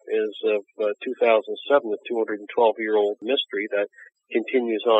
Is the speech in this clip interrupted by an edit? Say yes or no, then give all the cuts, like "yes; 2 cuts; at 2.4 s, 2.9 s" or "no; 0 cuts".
yes; 1 cut; at 3.2 s